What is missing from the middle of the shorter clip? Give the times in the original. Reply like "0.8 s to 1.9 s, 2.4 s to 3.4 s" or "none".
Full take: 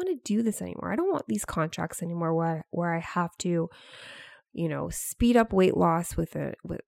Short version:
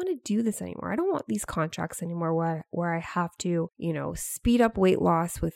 3.7 s to 4.5 s